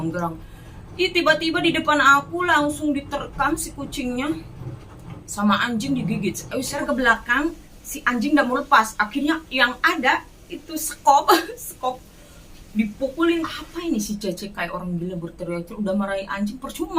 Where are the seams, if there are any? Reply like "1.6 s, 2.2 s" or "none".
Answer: 6.8 s, 13.5 s